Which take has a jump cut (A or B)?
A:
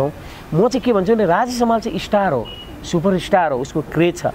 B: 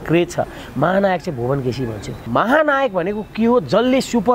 B